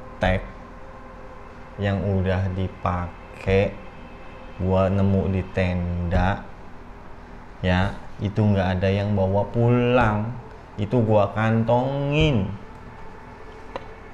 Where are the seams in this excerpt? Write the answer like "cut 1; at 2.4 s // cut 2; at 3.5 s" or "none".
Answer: none